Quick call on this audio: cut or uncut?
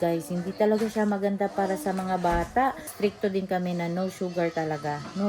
cut